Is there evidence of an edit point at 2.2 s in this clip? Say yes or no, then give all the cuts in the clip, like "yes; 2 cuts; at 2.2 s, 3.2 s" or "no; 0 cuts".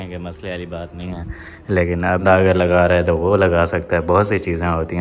yes; 1 cut; at 2.2 s